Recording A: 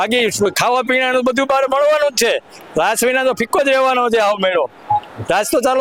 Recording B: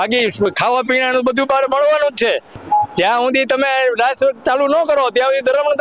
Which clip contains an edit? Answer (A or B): B